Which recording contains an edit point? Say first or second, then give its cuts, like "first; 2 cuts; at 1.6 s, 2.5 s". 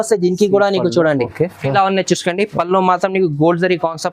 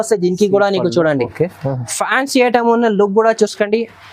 first; 1 cut; at 1.6 s